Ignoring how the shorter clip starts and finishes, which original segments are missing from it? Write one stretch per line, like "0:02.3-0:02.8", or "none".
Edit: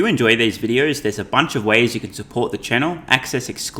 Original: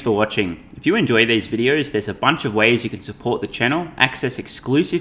none